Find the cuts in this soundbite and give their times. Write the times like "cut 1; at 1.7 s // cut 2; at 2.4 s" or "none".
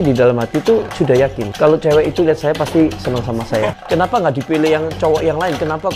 cut 1; at 1.4 s // cut 2; at 3.7 s